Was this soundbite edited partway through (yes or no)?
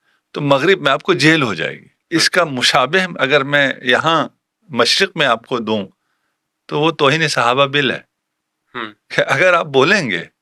no